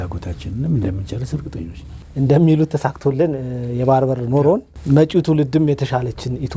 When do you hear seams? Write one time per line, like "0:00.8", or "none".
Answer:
none